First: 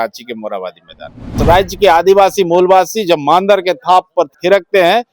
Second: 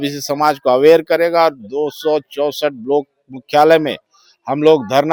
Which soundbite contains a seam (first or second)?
first